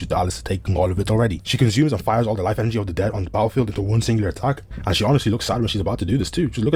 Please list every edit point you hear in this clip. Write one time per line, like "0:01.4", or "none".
none